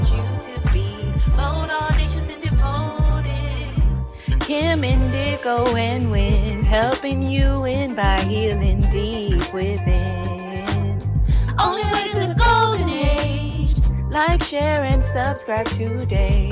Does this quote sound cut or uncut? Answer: uncut